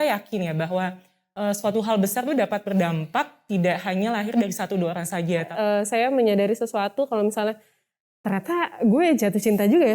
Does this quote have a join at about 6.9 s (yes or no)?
no